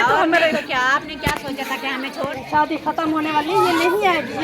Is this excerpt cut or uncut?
cut